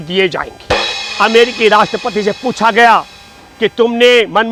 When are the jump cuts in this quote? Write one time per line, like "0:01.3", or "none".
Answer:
0:01.0